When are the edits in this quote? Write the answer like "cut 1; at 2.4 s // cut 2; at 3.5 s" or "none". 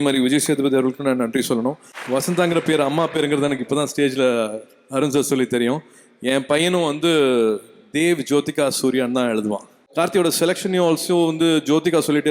cut 1; at 1.9 s // cut 2; at 9.8 s